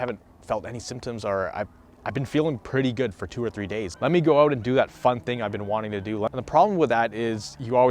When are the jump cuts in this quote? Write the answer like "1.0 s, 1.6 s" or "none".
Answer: 3.9 s, 6.3 s

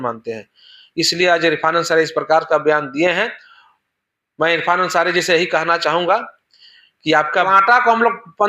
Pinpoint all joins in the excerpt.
7.5 s

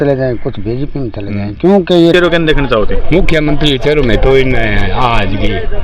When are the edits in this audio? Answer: 2.1 s

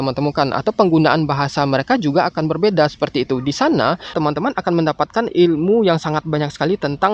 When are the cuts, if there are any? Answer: 4.1 s

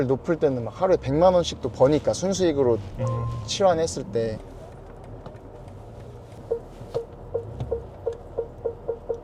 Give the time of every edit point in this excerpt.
none

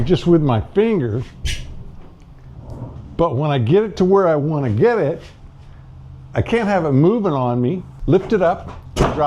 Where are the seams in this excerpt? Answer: 7.9 s

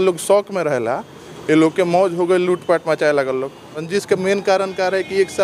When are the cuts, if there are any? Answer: 3.9 s

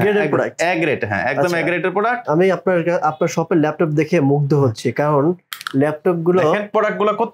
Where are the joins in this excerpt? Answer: 2.2 s

